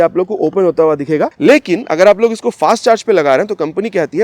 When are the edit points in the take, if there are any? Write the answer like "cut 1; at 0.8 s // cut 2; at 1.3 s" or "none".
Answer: cut 1; at 1.3 s